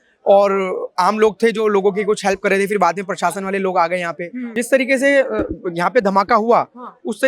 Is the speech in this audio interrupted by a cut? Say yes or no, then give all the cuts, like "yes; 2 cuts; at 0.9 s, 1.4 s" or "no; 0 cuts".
yes; 1 cut; at 4.6 s